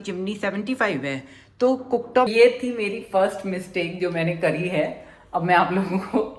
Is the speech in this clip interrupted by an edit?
yes; 1 cut; at 2.3 s

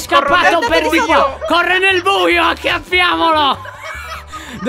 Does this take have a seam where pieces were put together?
no; 0 cuts

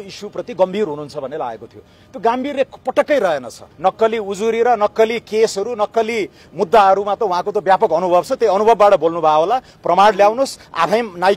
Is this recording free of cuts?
no; 1 cut; at 3.6 s

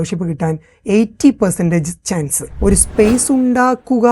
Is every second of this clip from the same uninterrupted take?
no; 1 cut; at 2.4 s

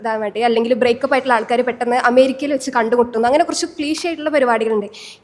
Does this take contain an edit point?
no; 0 cuts

